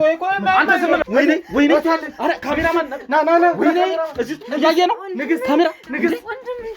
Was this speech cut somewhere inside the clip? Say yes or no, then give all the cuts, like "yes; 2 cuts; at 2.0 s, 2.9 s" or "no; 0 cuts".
yes; 1 cut; at 1.0 s